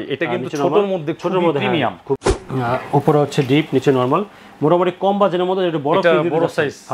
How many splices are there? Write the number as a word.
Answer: one